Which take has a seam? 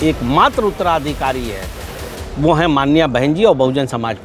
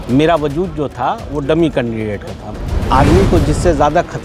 second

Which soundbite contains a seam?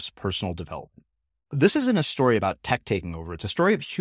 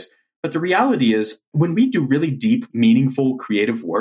second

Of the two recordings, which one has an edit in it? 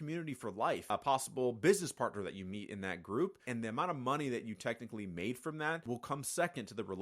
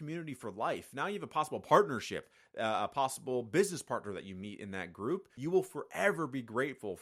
first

